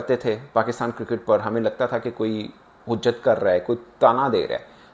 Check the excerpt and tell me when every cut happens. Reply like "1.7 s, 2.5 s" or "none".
none